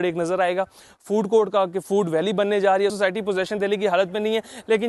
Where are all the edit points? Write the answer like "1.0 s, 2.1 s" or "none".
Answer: 2.9 s

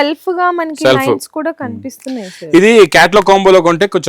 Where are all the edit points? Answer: none

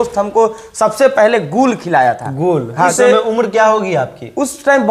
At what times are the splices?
2.9 s

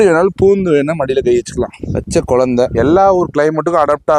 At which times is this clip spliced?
none

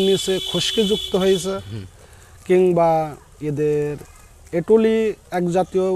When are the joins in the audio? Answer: none

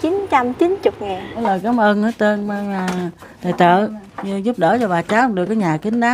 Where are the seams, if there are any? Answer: 1.4 s

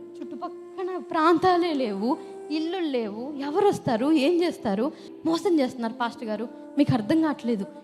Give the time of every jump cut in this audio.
5.0 s

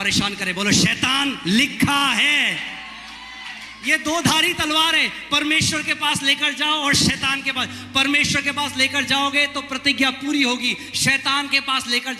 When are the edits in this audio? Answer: none

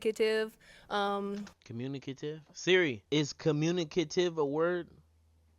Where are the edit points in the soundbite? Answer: 3.0 s

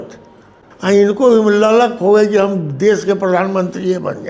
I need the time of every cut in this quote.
1.1 s

